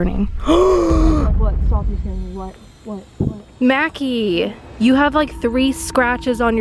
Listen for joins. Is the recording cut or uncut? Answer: uncut